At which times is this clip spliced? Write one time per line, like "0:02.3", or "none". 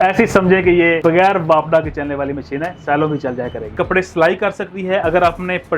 0:01.0
0:03.7